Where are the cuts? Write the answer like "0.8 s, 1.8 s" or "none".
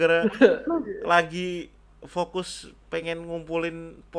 none

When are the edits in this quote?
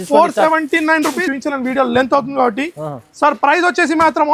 1.2 s

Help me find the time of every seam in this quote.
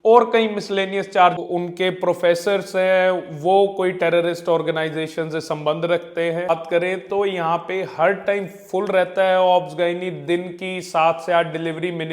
1.4 s, 6.5 s

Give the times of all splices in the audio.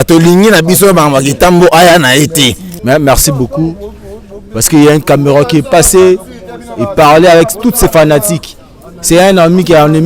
2.7 s

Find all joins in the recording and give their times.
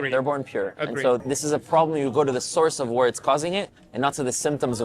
1.2 s

